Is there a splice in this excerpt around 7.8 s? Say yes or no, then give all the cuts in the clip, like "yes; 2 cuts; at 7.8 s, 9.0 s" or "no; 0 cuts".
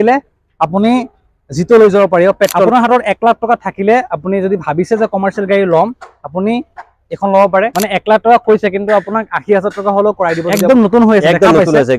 yes; 3 cuts; at 2.7 s, 7.8 s, 10.5 s